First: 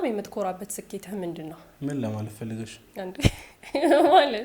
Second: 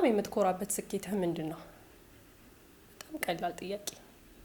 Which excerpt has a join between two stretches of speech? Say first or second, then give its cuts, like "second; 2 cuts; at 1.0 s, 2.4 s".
first; 1 cut; at 1.6 s